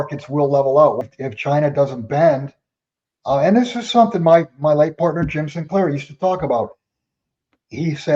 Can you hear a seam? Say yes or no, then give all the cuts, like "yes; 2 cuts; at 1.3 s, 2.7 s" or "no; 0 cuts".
yes; 1 cut; at 1.0 s